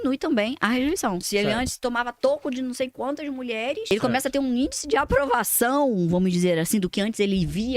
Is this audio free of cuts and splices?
no; 2 cuts; at 1.2 s, 3.9 s

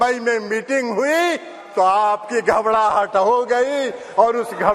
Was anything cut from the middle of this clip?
no; 0 cuts

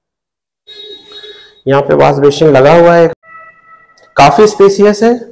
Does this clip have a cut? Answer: yes; 1 cut; at 3.1 s

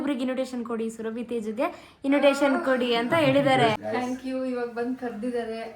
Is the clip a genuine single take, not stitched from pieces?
no; 1 cut; at 3.8 s

